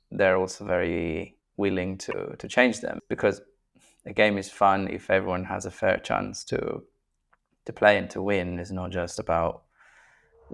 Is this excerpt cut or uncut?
cut